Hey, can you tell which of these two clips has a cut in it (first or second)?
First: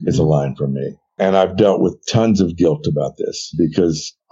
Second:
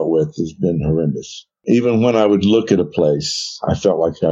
first